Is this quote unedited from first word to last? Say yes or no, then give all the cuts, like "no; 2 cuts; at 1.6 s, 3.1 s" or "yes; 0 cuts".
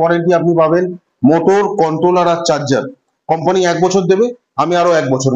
yes; 0 cuts